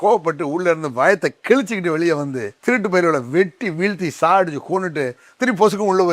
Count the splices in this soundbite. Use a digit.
1